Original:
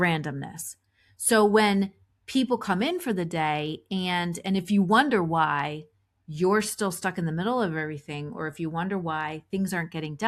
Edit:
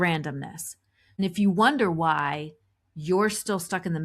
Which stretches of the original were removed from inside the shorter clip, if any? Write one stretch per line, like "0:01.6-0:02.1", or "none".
0:01.1-0:04.4